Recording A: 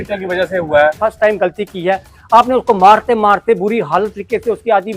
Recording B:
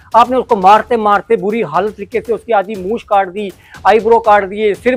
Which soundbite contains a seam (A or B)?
A